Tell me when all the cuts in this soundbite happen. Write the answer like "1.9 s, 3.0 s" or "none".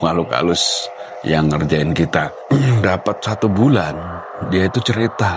2.4 s